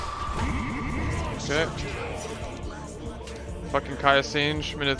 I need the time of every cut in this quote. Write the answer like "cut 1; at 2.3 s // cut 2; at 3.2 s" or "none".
none